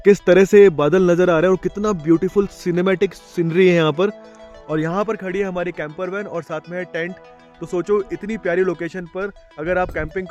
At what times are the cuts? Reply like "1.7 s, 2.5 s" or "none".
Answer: none